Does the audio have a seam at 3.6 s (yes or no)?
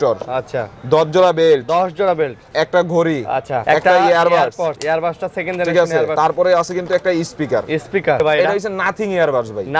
yes